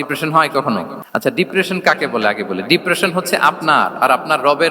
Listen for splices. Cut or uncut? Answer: cut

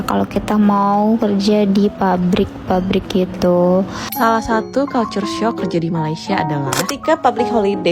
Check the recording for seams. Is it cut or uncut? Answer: cut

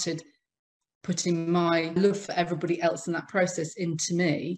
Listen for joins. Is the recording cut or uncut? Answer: uncut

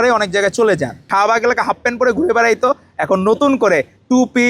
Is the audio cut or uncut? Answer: cut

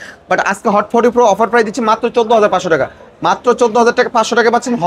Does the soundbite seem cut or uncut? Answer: uncut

